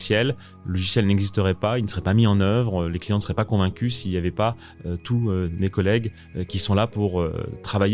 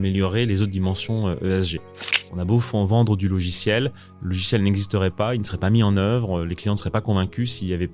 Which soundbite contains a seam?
second; 1 cut; at 2.3 s

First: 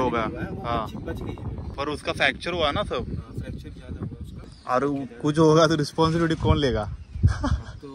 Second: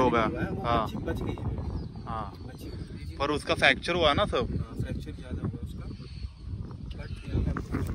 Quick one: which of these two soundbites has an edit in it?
first; 2 cuts; at 1.6 s, 4.5 s

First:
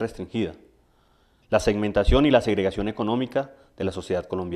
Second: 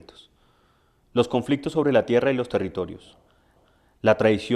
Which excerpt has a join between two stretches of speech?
second; 1 cut; at 3.4 s

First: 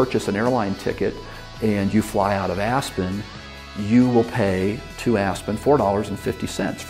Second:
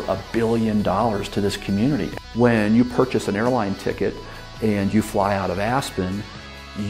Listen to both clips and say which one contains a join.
second; 1 cut; at 2.1 s

